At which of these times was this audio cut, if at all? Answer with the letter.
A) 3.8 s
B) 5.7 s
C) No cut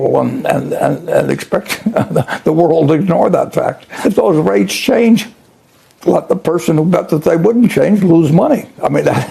A